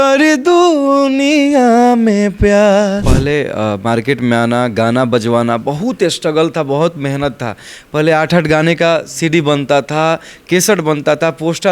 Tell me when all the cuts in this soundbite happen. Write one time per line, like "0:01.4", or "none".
0:03.1